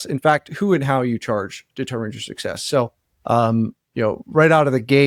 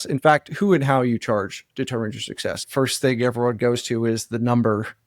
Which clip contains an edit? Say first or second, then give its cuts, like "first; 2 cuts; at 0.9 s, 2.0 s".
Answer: second; 1 cut; at 2.6 s